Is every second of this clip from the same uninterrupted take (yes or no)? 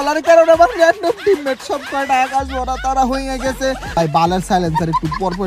no